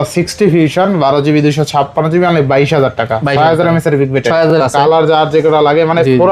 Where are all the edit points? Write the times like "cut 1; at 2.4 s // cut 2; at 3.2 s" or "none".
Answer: cut 1; at 4.6 s